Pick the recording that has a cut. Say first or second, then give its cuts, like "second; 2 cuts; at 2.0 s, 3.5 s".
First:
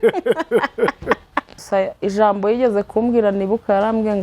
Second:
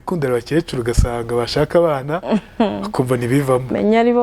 first; 1 cut; at 1.6 s